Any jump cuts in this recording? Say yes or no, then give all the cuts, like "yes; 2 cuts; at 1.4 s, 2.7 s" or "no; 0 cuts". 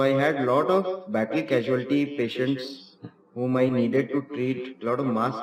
no; 0 cuts